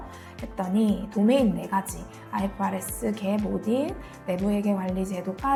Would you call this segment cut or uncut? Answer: uncut